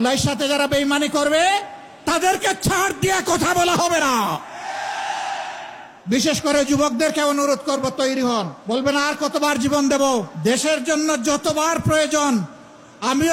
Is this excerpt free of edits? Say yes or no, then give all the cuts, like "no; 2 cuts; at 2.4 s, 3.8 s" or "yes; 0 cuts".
yes; 0 cuts